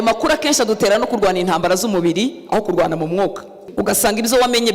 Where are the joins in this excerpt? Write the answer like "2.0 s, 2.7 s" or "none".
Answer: 3.6 s